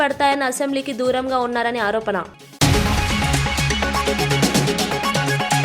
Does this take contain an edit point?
yes; 1 cut; at 2.4 s

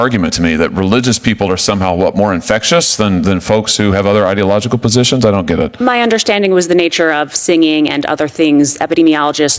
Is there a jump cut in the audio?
no; 0 cuts

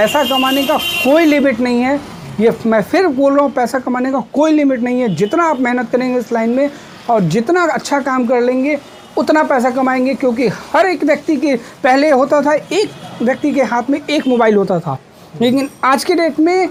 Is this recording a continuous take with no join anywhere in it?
yes; 0 cuts

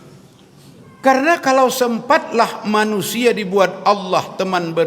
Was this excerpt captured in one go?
yes; 0 cuts

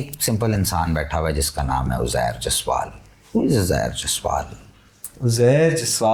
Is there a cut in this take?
no; 0 cuts

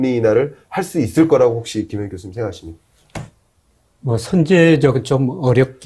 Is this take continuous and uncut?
yes; 0 cuts

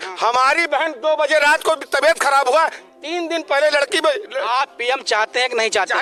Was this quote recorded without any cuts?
yes; 0 cuts

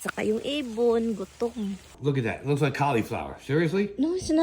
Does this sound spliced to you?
yes; 1 cut; at 1.9 s

